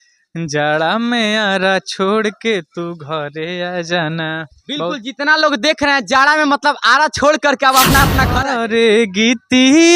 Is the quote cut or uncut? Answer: cut